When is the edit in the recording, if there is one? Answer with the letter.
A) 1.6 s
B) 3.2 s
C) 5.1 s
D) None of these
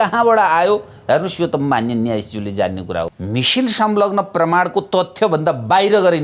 B